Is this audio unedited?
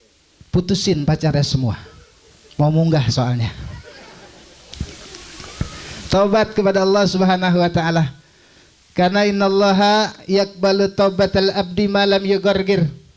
no; 1 cut; at 4.7 s

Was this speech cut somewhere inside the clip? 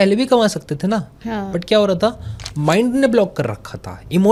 no; 0 cuts

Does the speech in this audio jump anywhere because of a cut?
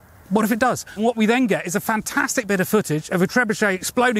yes; 1 cut; at 1.0 s

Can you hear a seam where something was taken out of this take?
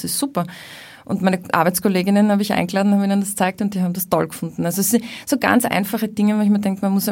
no; 0 cuts

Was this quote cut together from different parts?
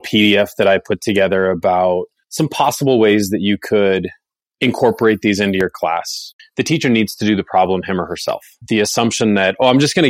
yes; 2 cuts; at 6.3 s, 8.5 s

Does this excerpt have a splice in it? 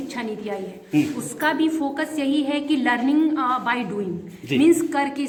no; 0 cuts

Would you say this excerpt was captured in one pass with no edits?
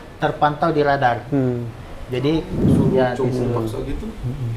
no; 1 cut; at 2.6 s

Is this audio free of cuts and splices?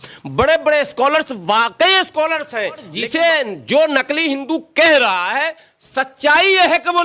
no; 1 cut; at 3.0 s

